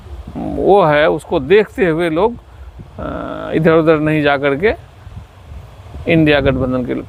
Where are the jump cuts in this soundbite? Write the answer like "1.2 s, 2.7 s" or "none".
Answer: none